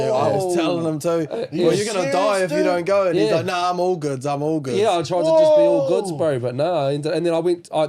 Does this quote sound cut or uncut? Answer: uncut